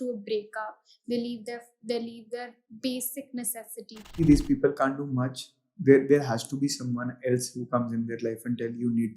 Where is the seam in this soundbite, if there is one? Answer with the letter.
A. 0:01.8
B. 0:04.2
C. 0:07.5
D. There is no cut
B